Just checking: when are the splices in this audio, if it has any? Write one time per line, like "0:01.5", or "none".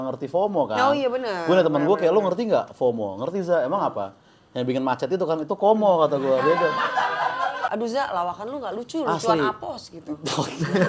0:07.7